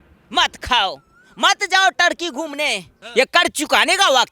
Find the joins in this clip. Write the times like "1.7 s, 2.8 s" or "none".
2.9 s

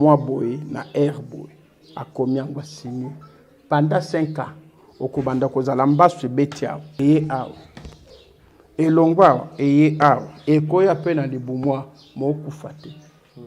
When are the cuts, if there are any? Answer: 6.9 s

